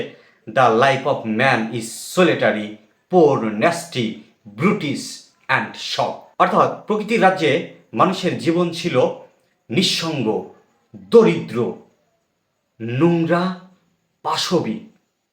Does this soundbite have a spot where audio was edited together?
yes; 1 cut; at 6.2 s

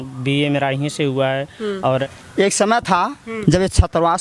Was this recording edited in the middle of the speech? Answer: yes; 1 cut; at 2.0 s

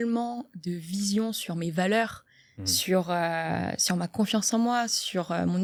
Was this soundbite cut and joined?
no; 0 cuts

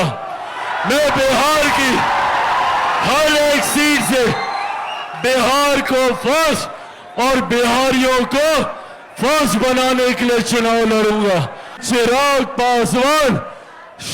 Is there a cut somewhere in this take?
yes; 1 cut; at 11.8 s

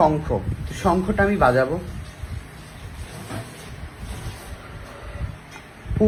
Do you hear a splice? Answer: no; 0 cuts

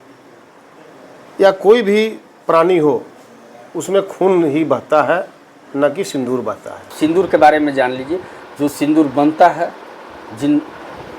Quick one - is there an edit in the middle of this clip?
yes; 1 cut; at 6.9 s

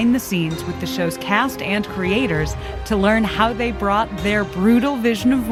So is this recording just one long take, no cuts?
yes; 0 cuts

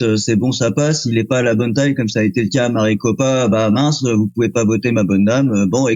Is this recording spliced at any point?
no; 0 cuts

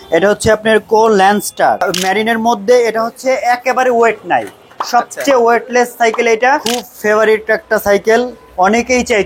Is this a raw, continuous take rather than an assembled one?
no; 2 cuts; at 1.9 s, 6.8 s

